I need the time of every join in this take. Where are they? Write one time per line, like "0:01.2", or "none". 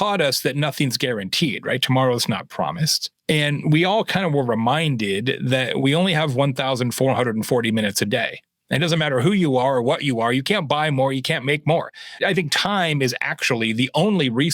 0:03.1
0:12.2

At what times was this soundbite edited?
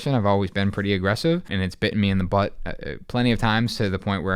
0:01.5

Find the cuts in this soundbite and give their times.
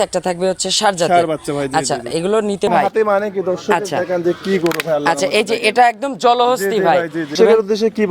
0:02.7
0:07.3

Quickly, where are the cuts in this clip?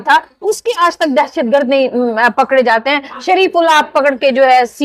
none

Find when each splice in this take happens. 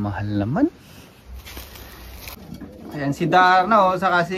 0:02.4

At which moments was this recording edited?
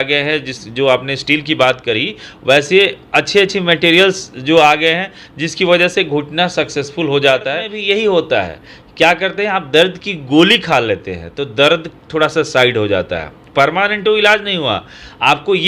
0:07.7

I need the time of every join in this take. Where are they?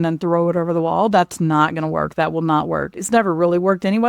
0:03.0

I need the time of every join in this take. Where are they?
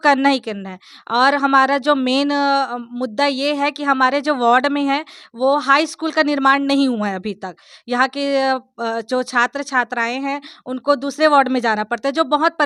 none

